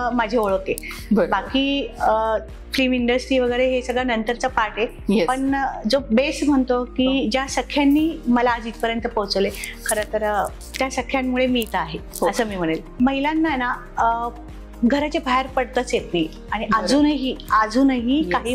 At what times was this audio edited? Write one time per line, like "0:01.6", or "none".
0:12.9